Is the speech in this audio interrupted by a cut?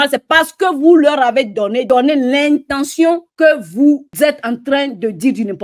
yes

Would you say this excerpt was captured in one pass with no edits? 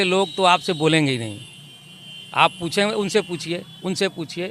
yes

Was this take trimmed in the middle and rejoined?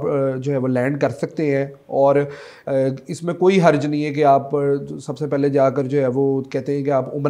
no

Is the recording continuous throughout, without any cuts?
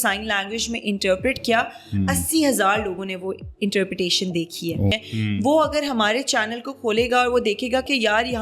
no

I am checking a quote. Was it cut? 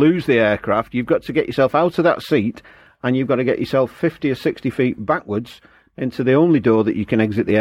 no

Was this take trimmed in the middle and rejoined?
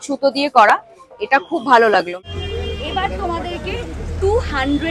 yes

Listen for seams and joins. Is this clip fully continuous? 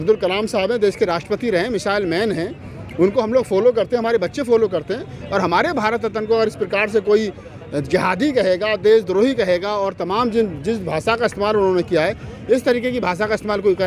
yes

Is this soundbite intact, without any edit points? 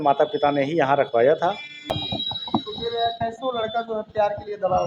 no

